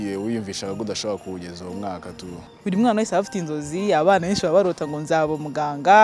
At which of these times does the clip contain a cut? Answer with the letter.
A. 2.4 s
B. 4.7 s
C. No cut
A